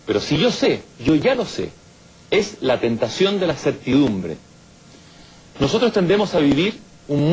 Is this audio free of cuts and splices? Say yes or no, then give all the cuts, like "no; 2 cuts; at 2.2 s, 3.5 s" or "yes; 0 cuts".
no; 1 cut; at 5.7 s